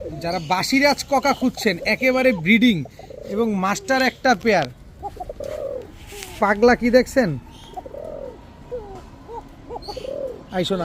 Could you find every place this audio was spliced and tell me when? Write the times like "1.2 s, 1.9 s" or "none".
none